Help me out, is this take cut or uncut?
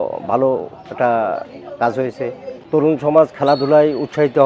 cut